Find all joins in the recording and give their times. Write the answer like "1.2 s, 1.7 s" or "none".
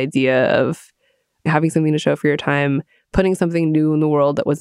none